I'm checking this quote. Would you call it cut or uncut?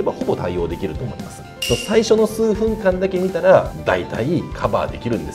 cut